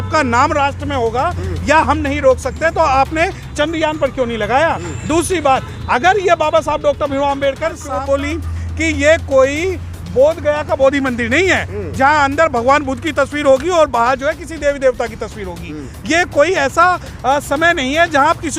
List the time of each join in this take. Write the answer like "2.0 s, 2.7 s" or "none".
7.8 s